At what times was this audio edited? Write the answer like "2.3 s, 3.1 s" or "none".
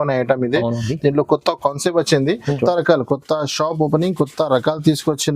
2.6 s